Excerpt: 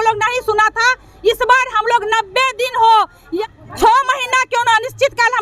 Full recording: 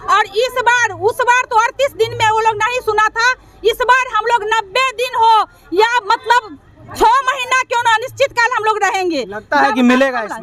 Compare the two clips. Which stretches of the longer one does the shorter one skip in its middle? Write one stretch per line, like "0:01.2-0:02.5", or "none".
0:05.7-0:06.5

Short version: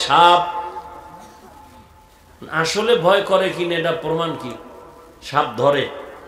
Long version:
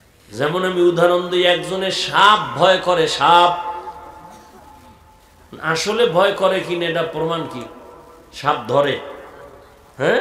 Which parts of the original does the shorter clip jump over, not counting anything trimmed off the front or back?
none

